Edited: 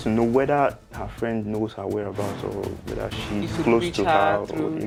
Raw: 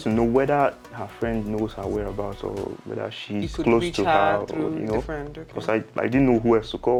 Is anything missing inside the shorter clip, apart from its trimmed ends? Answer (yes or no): no